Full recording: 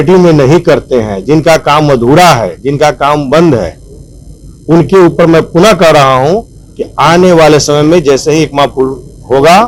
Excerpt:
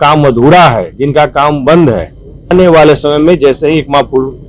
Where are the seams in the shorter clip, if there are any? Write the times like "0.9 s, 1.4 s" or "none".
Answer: 2.5 s